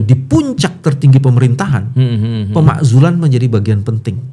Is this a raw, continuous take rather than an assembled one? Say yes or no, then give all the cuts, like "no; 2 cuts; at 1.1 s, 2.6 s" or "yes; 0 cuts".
yes; 0 cuts